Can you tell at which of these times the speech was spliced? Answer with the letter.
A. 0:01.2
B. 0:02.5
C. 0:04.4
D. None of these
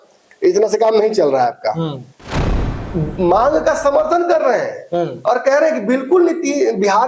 B